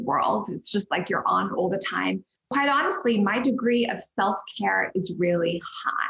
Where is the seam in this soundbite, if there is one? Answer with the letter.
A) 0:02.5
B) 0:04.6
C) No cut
A